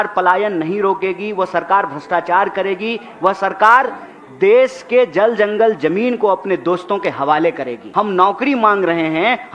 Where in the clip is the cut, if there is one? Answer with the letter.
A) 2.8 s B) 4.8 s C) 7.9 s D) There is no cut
C